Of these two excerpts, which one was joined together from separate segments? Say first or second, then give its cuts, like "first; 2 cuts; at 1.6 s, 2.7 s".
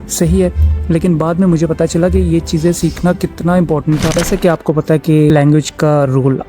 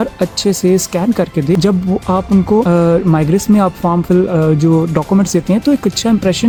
first; 1 cut; at 4.2 s